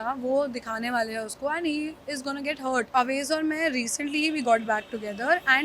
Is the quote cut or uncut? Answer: cut